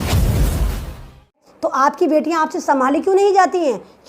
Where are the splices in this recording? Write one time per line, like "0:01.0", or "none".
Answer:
0:01.4